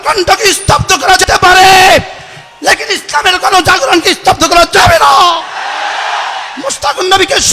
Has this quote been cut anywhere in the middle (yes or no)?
yes